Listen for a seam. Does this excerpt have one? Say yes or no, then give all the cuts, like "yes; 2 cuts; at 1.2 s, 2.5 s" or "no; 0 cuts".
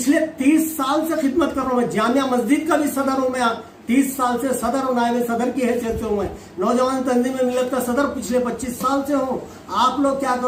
no; 0 cuts